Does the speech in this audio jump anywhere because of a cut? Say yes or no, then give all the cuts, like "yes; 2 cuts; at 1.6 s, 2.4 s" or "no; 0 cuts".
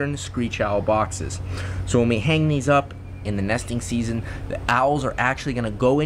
no; 0 cuts